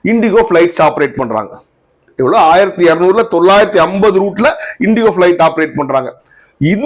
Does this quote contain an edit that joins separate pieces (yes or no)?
no